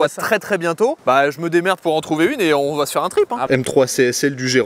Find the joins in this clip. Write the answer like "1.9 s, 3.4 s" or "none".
1.0 s, 3.4 s